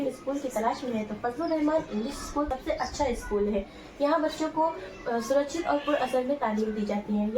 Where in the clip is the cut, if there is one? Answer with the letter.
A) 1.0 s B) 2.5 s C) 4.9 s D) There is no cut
B